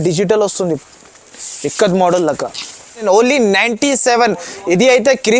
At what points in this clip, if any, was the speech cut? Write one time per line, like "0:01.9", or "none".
0:03.0